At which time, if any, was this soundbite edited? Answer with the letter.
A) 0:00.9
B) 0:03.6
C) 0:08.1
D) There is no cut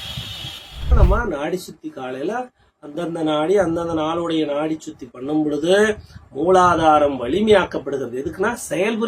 A